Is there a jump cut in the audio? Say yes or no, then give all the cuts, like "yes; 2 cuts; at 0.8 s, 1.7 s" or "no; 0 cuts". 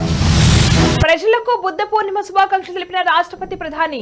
no; 0 cuts